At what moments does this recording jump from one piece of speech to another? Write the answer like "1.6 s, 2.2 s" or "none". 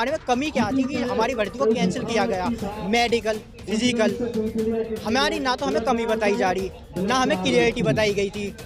none